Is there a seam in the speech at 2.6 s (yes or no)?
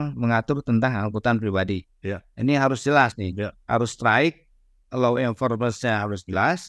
no